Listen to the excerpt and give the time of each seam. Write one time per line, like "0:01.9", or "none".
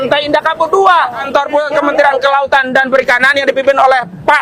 0:01.2